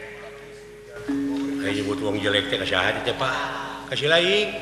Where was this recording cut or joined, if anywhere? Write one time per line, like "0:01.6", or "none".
none

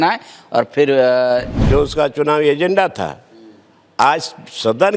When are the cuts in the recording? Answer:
0:01.6

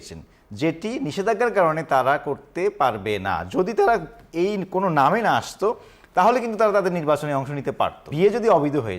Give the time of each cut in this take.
0:08.1

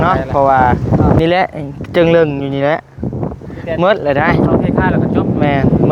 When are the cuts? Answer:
0:01.2

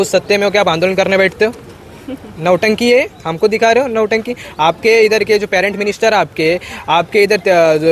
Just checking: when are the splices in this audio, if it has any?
none

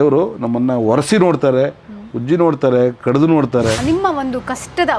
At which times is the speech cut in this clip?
0:03.8

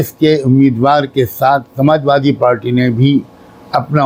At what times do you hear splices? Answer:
none

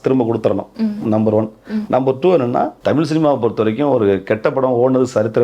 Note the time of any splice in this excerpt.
none

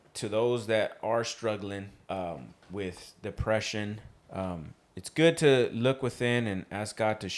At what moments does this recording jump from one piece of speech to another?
0:01.9
0:04.1

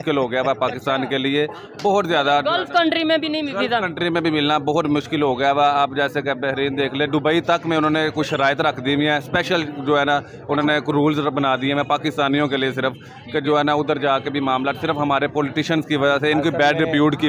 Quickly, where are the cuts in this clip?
none

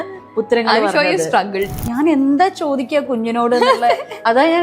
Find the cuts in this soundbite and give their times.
0:01.7

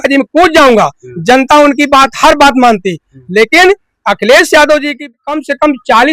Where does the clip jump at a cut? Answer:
0:05.1

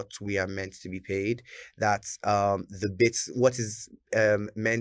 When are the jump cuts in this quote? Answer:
none

